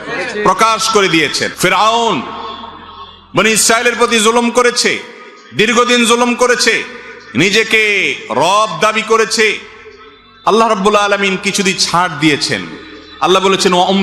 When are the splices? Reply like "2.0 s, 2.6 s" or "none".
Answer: 1.4 s